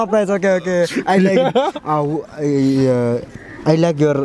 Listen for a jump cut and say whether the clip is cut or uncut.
uncut